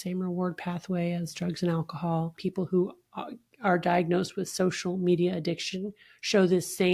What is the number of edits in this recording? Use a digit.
1